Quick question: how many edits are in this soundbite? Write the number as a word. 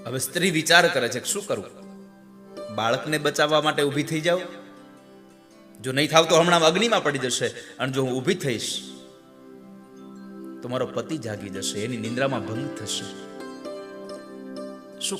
one